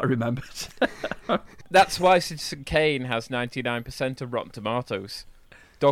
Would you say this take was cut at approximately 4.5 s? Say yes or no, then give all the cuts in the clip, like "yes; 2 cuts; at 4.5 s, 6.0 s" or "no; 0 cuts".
no; 1 cut; at 1.6 s